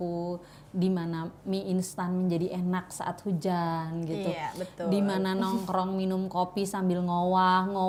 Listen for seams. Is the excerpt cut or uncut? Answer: uncut